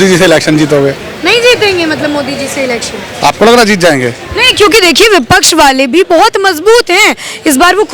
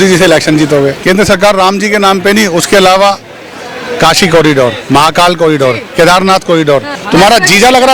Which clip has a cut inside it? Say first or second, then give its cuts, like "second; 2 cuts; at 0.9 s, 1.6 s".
second; 2 cuts; at 1.0 s, 7.0 s